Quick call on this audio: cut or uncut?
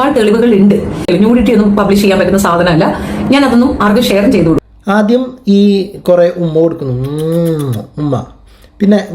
cut